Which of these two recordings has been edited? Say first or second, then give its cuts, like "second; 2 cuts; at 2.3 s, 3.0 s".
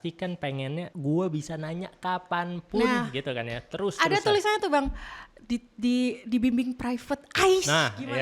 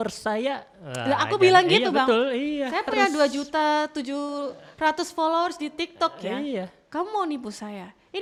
first; 1 cut; at 0.9 s